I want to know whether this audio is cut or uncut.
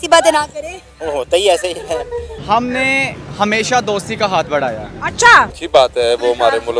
cut